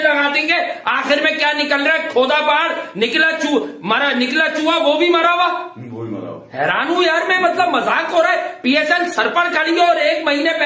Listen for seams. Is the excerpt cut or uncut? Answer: uncut